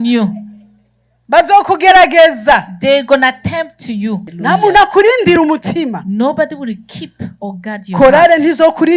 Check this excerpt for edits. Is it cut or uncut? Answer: cut